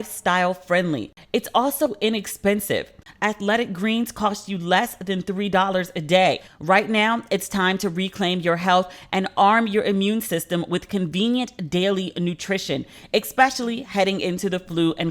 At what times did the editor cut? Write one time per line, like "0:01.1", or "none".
0:01.1
0:06.5